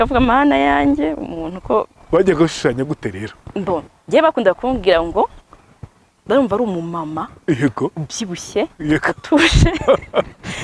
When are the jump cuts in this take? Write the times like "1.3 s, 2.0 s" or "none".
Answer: none